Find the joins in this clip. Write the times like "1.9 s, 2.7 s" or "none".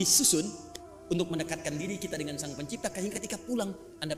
none

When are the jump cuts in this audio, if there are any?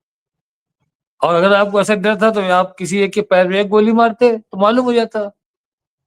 none

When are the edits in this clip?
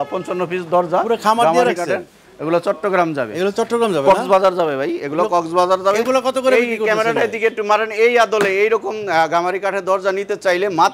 none

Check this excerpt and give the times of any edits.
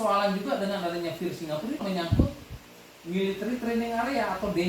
1.8 s

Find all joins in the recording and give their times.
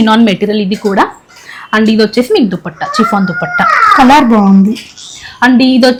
none

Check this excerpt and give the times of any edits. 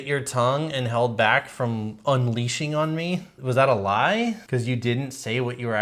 3.3 s, 4.4 s

